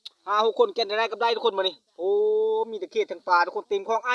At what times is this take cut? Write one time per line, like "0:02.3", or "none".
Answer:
none

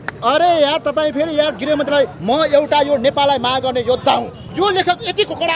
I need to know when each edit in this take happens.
0:04.4

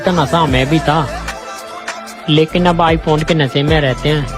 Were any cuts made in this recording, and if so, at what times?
none

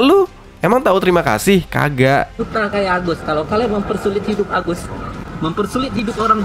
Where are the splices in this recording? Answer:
0:02.3

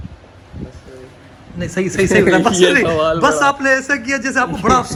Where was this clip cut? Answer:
none

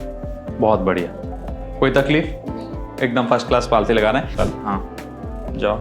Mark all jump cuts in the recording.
0:04.3

